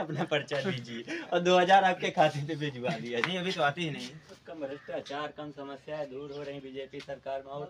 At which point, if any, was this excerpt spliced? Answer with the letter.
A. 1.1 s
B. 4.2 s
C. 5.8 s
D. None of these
B